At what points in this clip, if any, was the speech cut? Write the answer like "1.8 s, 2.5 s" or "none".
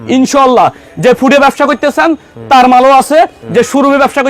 none